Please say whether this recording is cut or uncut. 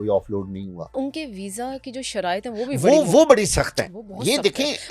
cut